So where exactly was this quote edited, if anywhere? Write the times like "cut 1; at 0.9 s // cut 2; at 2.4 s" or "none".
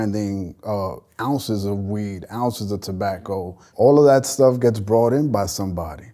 cut 1; at 3.7 s